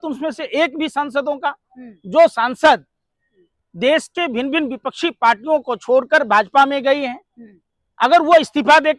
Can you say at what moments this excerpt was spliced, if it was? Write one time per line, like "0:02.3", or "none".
none